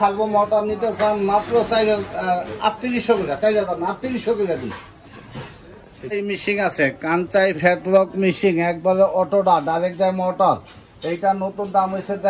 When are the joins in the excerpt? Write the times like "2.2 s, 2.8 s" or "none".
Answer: 6.1 s